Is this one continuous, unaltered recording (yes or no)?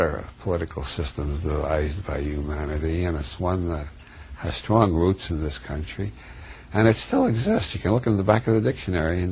no